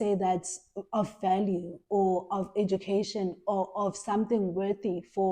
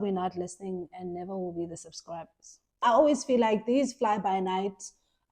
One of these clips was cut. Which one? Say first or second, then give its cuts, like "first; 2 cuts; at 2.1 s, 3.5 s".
second; 1 cut; at 2.8 s